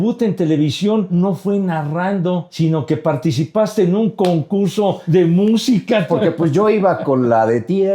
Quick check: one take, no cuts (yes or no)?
no